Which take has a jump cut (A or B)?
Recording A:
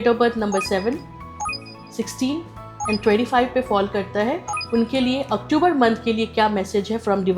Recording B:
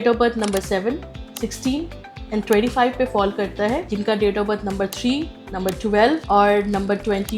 B